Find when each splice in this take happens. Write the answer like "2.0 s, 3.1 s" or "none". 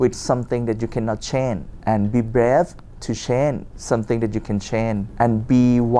1.7 s, 3.7 s, 5.1 s